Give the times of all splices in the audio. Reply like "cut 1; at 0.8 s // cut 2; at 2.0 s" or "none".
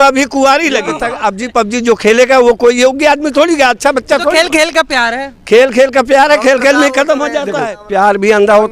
cut 1; at 1.1 s // cut 2; at 7.5 s